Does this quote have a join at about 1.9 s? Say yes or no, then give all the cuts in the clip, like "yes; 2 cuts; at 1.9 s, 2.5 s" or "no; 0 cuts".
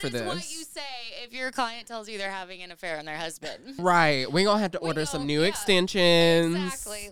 no; 1 cut; at 3.8 s